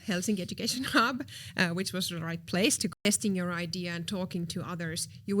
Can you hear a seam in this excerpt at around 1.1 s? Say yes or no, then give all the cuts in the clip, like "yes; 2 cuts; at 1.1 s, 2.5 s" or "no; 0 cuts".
no; 1 cut; at 3.0 s